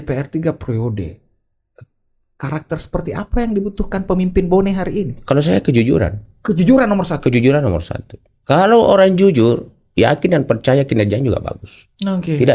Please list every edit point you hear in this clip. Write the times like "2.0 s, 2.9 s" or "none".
none